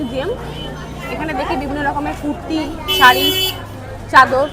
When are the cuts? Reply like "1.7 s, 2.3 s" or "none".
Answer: none